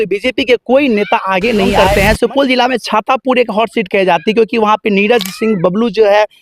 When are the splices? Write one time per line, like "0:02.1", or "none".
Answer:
0:01.8